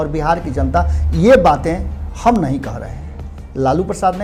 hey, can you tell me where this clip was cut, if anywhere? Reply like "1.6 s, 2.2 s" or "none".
none